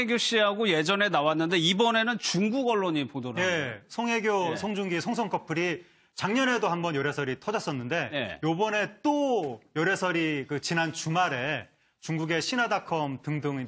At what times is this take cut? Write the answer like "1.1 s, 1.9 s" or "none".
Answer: none